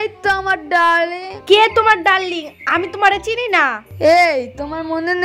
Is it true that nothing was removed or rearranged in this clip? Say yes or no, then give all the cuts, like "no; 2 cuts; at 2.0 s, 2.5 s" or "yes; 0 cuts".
no; 2 cuts; at 1.3 s, 3.9 s